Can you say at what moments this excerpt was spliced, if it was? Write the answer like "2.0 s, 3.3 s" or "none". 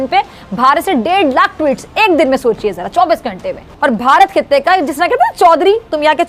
3.7 s